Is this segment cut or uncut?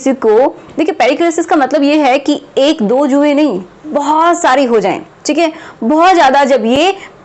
uncut